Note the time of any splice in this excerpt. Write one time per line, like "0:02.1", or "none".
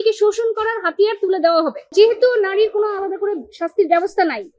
0:01.8